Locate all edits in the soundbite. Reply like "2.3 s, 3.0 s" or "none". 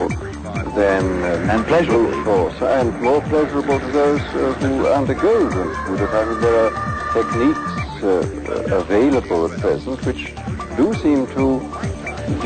none